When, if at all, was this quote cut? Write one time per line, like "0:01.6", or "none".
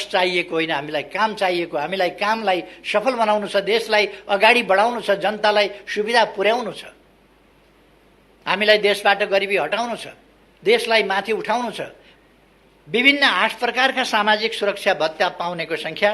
0:12.0